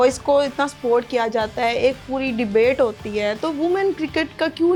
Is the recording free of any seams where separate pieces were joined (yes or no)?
yes